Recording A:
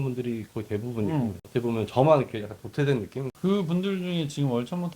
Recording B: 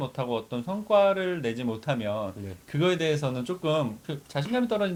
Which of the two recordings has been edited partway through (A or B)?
A